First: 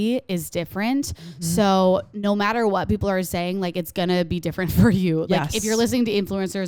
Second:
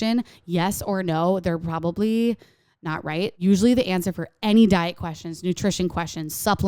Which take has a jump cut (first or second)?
second